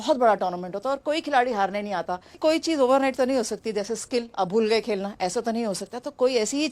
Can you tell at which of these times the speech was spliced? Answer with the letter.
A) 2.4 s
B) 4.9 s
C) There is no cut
A